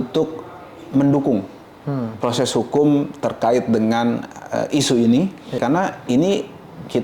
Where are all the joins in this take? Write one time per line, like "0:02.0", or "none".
0:05.6